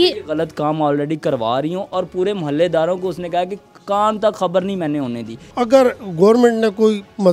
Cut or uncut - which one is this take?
cut